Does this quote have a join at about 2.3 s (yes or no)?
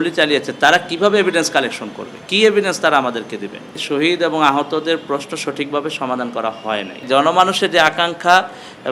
no